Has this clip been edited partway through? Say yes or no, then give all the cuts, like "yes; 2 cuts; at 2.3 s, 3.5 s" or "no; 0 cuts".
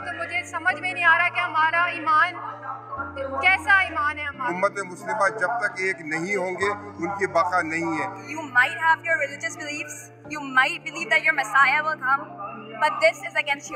yes; 2 cuts; at 4.5 s, 8.2 s